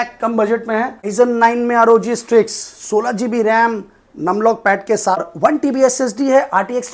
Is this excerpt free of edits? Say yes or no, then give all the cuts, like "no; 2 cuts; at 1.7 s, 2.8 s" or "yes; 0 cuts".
no; 2 cuts; at 1.0 s, 5.3 s